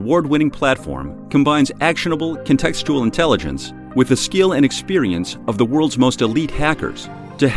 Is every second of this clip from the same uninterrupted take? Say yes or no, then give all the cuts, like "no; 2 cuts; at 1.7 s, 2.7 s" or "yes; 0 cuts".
yes; 0 cuts